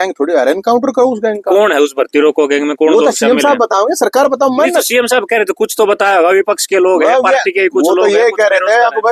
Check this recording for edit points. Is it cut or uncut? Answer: uncut